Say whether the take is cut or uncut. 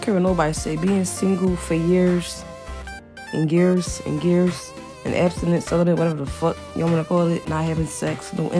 uncut